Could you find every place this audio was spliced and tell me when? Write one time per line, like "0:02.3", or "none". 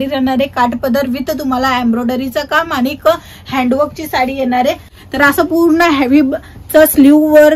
0:04.9